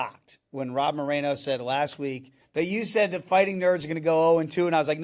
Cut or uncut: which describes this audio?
cut